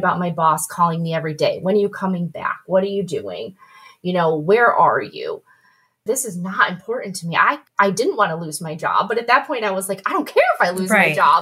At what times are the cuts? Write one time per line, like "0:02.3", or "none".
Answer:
none